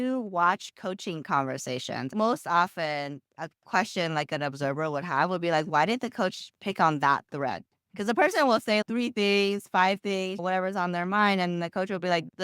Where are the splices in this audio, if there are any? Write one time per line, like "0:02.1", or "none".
0:02.1
0:08.8
0:10.4